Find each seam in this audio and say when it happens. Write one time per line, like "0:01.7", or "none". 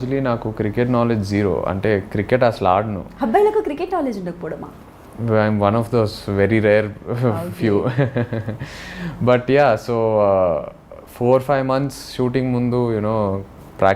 none